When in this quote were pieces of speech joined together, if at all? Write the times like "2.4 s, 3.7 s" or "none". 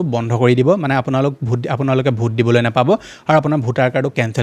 none